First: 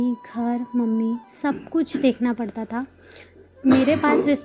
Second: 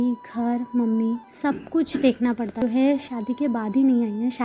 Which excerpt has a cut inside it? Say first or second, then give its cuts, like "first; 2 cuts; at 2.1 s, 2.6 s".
second; 1 cut; at 2.6 s